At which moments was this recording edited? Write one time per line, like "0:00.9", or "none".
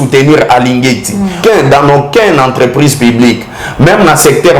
0:01.4